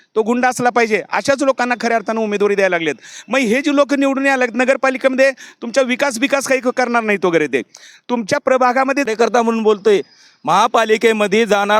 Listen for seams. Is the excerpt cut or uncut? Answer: cut